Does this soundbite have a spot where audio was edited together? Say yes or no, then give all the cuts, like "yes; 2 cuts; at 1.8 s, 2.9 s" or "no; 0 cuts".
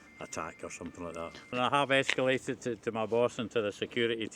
yes; 1 cut; at 1.6 s